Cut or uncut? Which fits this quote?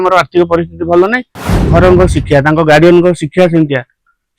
cut